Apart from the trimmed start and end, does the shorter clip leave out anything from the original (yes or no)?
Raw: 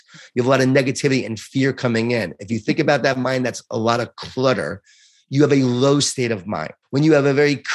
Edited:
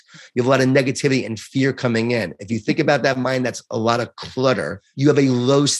yes